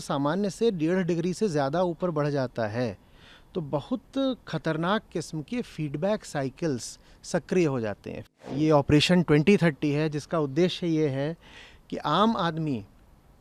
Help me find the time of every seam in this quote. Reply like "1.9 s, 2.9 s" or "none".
8.2 s